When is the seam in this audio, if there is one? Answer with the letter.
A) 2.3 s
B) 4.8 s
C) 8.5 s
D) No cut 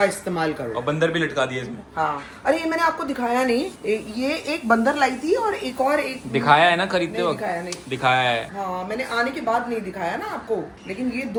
D